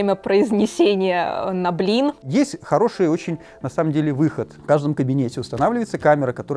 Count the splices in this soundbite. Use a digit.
1